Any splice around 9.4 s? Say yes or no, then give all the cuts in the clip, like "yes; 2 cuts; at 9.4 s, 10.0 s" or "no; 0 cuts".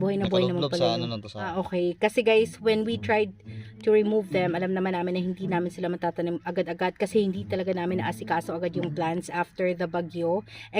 no; 1 cut; at 1.5 s